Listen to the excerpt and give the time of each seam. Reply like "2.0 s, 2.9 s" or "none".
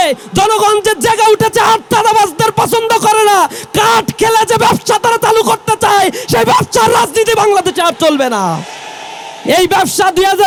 none

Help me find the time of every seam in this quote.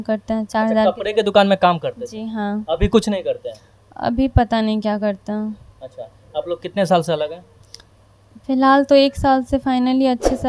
none

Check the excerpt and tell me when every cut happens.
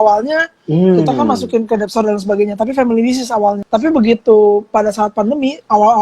3.6 s

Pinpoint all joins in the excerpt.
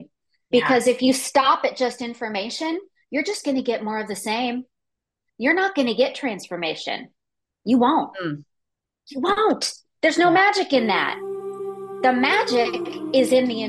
none

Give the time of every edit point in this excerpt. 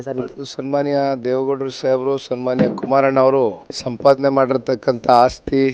none

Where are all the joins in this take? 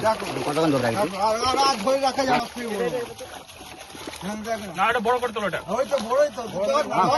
2.4 s

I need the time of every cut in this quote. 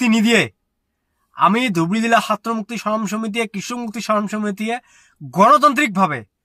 none

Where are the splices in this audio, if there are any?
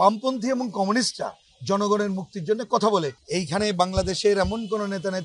3.2 s

